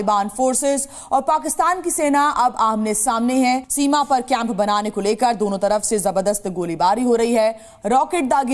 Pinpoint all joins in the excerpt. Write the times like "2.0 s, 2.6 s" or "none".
3.7 s